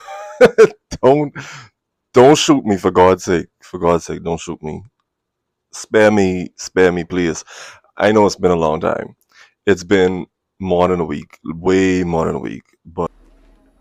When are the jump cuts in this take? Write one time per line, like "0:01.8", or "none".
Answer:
none

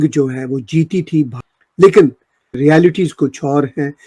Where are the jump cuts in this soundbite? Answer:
0:01.4
0:02.5

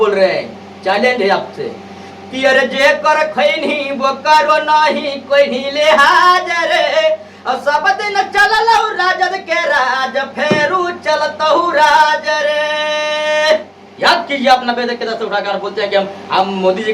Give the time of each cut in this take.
0:13.7

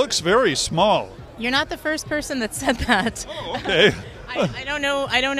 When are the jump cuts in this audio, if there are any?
0:01.2

